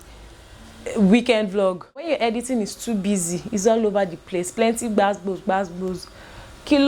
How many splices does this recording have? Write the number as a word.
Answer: one